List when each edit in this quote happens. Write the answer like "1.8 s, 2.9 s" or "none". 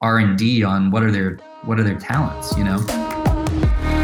none